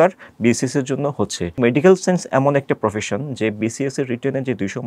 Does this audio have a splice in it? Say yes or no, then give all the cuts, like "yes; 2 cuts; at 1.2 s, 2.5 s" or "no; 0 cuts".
yes; 1 cut; at 1.6 s